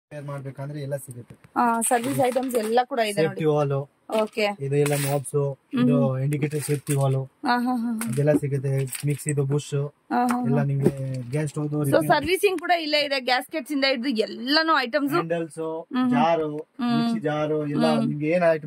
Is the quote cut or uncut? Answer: uncut